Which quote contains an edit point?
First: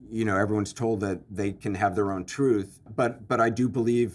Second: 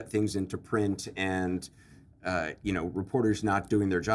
first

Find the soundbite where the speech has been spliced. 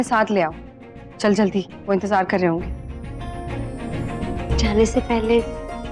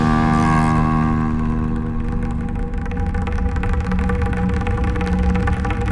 first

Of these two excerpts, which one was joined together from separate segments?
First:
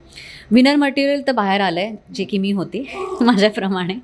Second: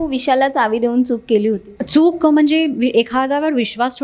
second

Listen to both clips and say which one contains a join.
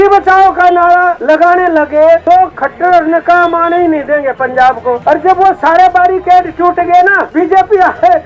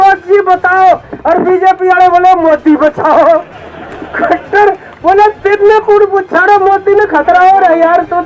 first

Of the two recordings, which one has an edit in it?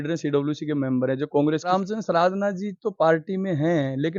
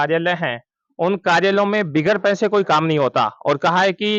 first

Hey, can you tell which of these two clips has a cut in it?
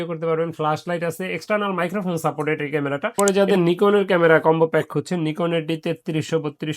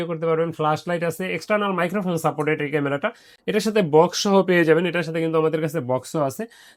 first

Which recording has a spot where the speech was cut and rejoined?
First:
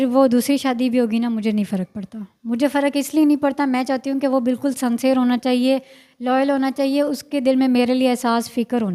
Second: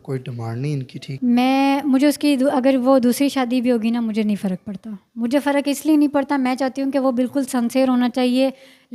second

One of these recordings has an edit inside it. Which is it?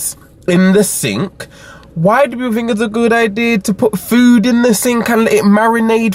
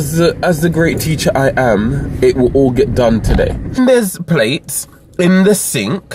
second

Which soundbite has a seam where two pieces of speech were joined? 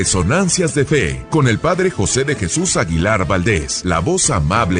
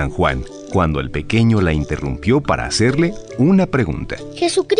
first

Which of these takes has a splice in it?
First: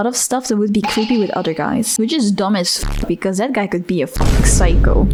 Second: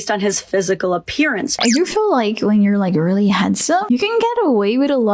second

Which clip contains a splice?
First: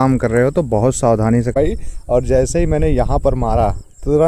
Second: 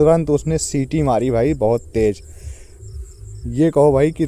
first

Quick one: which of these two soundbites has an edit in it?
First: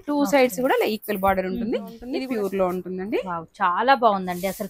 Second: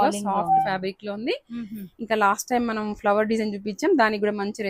first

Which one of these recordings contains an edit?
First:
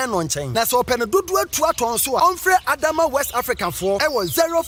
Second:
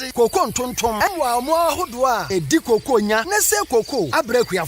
second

